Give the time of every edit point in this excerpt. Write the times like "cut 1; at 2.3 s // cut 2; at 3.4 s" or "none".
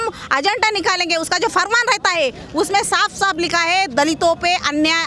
none